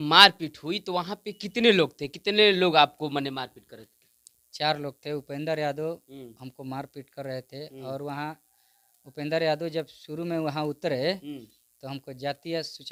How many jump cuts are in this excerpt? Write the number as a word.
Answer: zero